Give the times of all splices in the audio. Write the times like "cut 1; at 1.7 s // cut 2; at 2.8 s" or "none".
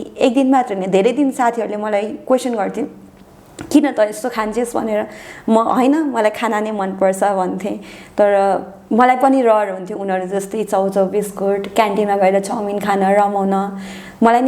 none